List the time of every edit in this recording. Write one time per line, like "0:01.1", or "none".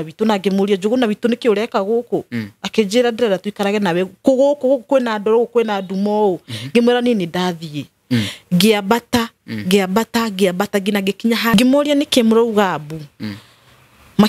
0:11.5